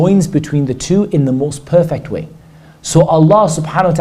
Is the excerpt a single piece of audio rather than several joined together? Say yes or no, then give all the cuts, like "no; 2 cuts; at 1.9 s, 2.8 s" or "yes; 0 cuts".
yes; 0 cuts